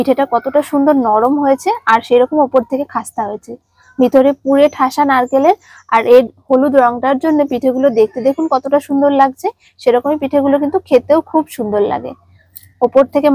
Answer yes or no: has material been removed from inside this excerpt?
no